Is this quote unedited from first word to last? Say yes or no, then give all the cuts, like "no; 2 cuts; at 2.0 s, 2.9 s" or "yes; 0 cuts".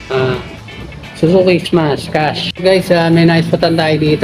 no; 1 cut; at 2.4 s